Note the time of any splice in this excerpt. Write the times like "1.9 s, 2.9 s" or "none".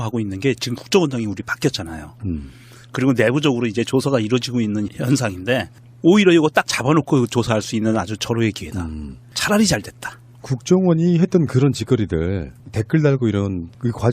12.3 s